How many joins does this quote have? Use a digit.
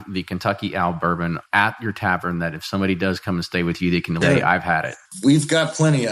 3